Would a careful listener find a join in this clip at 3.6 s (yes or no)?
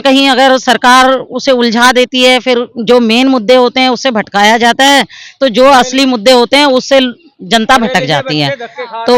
no